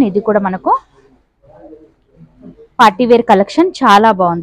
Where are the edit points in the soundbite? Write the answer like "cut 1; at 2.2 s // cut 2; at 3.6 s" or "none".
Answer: none